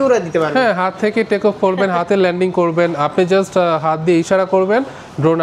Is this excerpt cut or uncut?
uncut